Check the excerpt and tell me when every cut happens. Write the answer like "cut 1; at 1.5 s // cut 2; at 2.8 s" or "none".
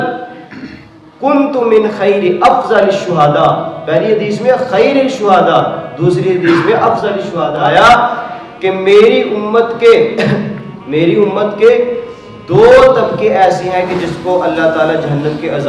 cut 1; at 7.5 s